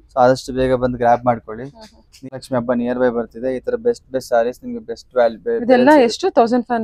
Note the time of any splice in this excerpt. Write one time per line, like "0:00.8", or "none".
0:02.3

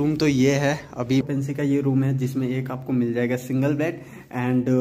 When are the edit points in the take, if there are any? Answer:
0:01.2

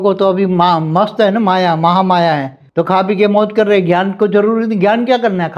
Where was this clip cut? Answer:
0:02.6

